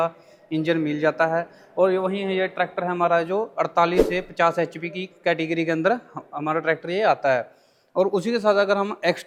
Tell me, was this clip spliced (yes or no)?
no